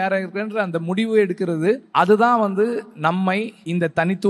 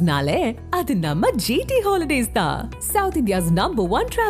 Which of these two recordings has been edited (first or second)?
first